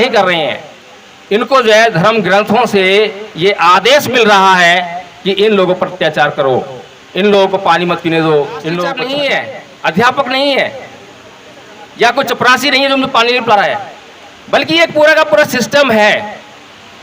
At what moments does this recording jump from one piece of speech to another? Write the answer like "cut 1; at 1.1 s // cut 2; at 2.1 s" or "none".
cut 1; at 9.3 s

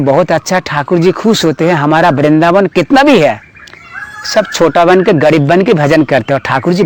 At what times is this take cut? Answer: none

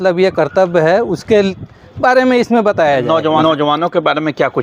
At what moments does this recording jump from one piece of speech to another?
none

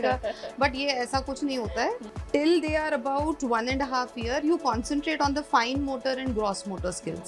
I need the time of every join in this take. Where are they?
cut 1; at 2.0 s

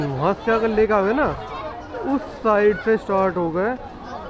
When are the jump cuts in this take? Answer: none

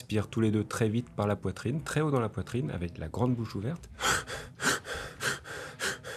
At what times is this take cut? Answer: none

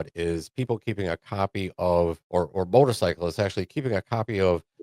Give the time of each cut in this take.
cut 1; at 2.2 s

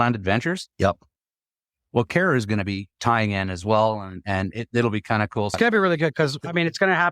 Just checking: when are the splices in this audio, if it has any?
cut 1; at 5.5 s

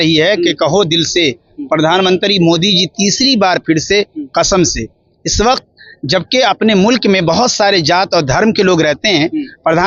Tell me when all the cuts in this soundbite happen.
none

